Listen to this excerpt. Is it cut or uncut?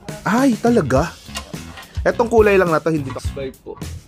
cut